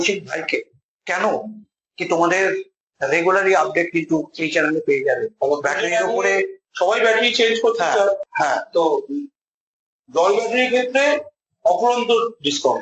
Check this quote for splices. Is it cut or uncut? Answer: uncut